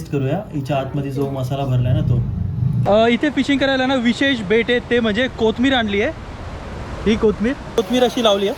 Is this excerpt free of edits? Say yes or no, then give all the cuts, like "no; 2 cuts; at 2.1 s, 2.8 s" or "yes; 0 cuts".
no; 2 cuts; at 2.8 s, 7.6 s